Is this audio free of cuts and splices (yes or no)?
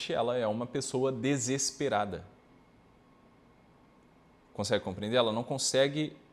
yes